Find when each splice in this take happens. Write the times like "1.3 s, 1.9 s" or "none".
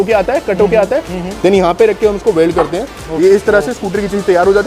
3.0 s